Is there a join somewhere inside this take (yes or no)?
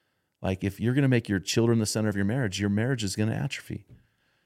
no